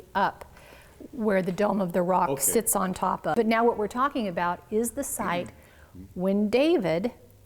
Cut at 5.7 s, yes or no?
no